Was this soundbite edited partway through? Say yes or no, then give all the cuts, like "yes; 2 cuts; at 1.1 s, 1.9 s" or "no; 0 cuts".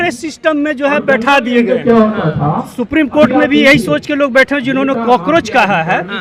no; 0 cuts